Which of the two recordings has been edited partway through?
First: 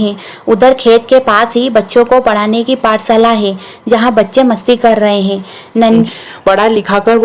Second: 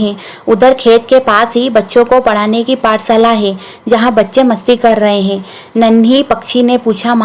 first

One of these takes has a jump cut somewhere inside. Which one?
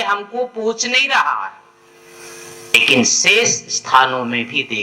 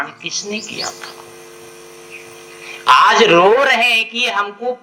first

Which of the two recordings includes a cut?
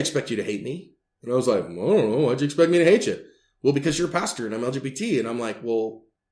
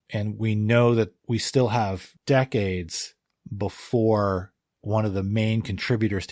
second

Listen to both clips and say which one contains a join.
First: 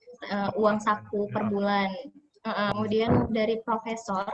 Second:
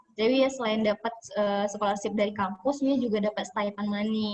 first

